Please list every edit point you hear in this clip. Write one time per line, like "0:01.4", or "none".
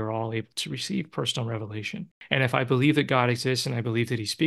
0:02.1